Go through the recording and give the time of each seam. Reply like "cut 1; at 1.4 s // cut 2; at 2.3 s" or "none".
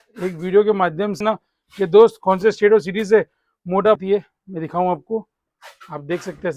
cut 1; at 1.2 s // cut 2; at 4.0 s